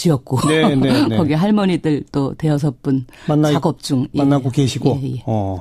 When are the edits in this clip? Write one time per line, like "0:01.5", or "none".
0:01.1